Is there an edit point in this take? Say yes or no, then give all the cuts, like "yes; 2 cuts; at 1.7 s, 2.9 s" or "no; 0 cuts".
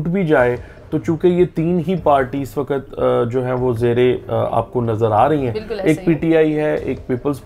no; 0 cuts